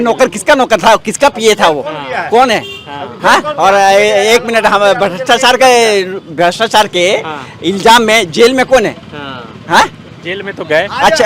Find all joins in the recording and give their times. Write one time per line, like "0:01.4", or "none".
none